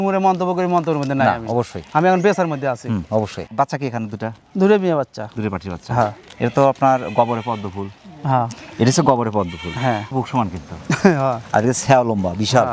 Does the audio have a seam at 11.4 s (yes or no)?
no